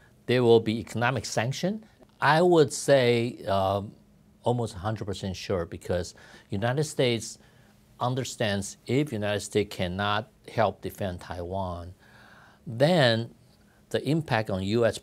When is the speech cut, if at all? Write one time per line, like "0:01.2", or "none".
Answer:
0:01.9